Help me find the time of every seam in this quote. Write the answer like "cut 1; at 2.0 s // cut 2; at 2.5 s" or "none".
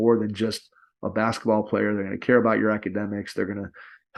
none